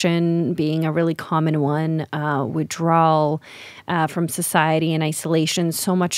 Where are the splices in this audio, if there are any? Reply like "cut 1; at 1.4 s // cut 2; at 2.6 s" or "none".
none

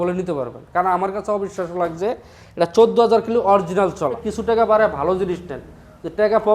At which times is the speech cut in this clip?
cut 1; at 4.3 s

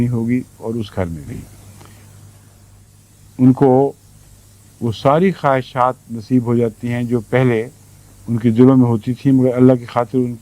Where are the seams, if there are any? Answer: cut 1; at 2.8 s

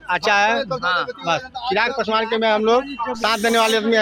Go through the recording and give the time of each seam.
none

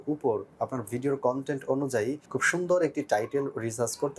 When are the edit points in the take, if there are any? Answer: cut 1; at 2.3 s

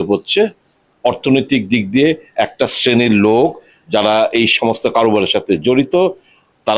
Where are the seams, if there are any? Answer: none

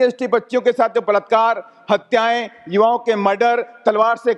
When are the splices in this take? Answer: none

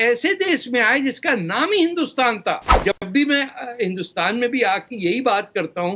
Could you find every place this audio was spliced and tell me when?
cut 1; at 2.7 s

